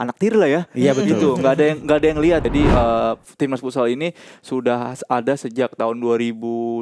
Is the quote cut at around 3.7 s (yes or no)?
no